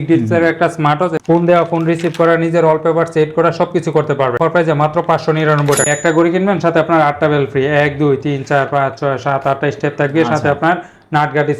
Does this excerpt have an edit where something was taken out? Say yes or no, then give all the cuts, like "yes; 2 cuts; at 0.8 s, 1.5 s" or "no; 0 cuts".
yes; 3 cuts; at 1.2 s, 4.4 s, 5.8 s